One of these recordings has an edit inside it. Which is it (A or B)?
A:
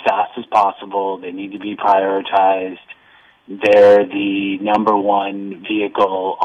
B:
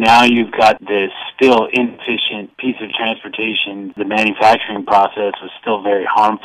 B